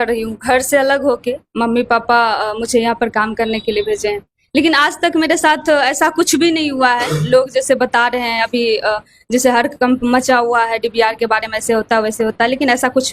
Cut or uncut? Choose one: uncut